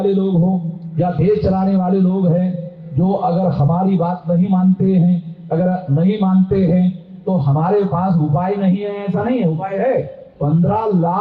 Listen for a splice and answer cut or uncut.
uncut